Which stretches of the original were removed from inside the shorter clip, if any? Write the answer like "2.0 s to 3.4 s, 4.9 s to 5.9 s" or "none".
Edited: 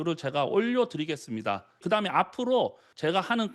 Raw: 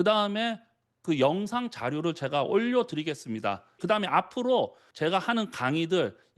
none